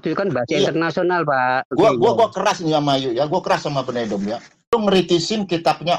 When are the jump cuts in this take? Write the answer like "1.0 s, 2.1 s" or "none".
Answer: 1.7 s, 4.7 s